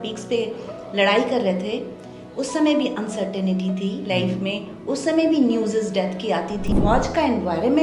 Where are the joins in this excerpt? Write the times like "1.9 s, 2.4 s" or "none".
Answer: 6.7 s